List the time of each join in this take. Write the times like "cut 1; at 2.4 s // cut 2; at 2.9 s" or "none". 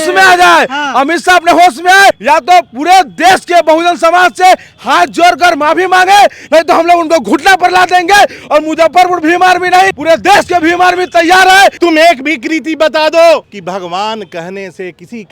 cut 1; at 2.2 s // cut 2; at 10.0 s // cut 3; at 11.8 s